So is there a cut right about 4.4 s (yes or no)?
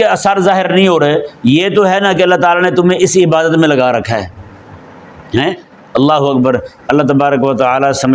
no